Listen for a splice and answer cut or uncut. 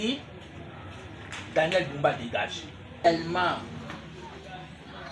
cut